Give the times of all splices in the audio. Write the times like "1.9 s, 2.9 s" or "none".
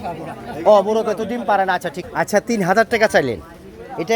2.0 s

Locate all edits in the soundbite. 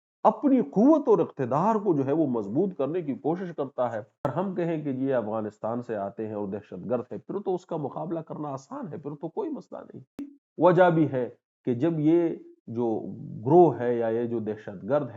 4.2 s, 10.4 s

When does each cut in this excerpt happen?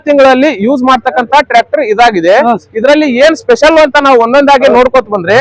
none

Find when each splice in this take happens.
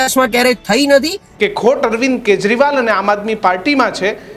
1.2 s

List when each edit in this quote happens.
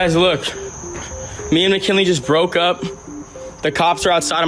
none

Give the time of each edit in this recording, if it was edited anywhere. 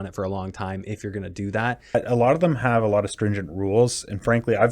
1.9 s

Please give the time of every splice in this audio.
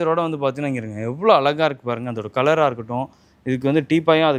none

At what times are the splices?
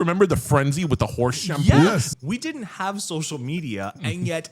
2.1 s

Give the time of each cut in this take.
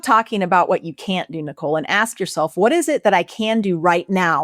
none

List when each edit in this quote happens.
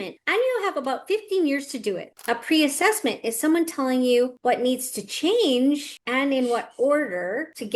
2.1 s

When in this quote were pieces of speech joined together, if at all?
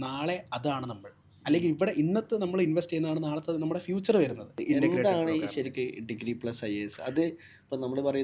4.5 s

